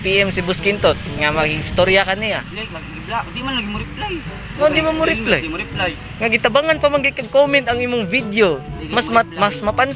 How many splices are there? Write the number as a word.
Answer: zero